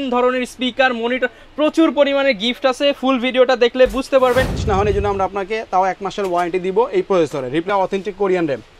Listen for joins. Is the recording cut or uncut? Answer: cut